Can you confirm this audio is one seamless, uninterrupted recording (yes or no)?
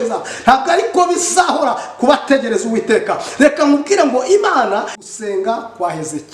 no